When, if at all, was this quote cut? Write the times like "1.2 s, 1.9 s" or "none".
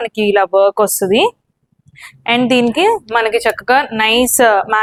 none